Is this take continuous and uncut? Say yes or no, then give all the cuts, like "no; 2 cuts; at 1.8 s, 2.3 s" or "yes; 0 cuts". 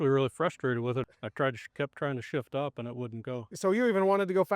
no; 1 cut; at 1.1 s